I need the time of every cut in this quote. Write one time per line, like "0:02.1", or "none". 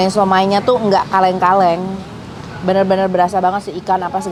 none